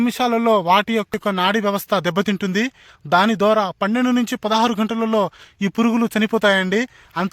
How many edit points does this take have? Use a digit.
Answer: 1